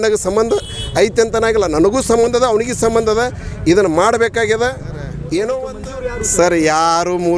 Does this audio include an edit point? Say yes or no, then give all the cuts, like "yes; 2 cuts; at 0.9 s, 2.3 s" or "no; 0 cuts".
yes; 1 cut; at 5.7 s